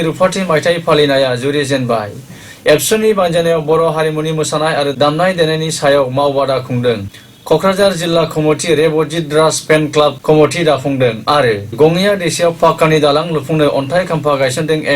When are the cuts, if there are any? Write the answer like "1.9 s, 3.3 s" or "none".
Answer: 10.2 s, 11.8 s

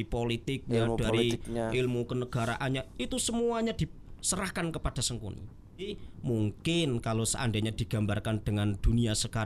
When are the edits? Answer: 5.9 s

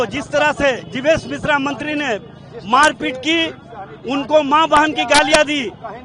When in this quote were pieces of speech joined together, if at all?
none

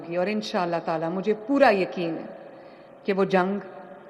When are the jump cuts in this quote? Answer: none

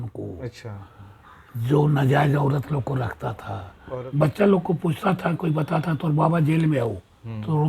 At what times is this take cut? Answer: 3.8 s

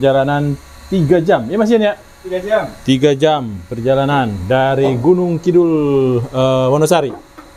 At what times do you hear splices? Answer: none

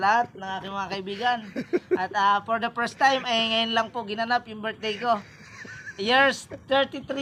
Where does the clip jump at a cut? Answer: none

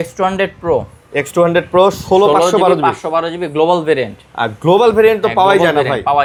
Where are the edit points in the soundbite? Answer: none

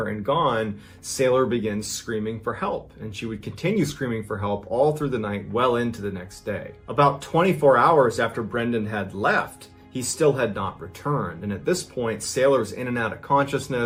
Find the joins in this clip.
none

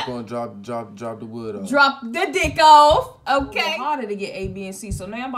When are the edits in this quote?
3.6 s

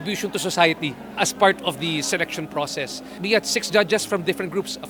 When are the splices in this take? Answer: none

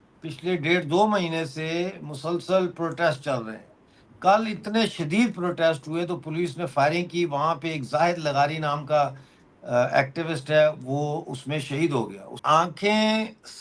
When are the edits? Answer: 12.4 s

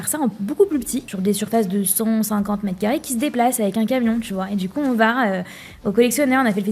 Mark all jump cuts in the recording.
1.1 s

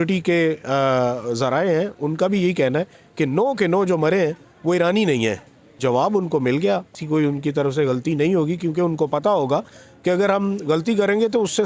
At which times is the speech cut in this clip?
5.8 s, 7.0 s

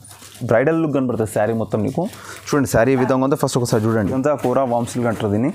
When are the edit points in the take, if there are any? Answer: 4.1 s

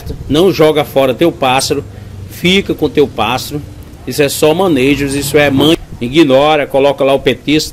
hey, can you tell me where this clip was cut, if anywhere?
5.8 s

